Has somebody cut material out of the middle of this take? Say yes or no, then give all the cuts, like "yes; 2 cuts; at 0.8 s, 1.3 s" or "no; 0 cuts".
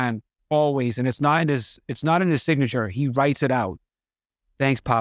no; 0 cuts